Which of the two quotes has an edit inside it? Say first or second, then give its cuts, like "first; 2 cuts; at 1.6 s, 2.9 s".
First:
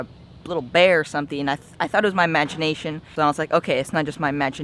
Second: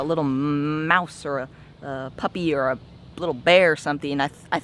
first; 1 cut; at 3.1 s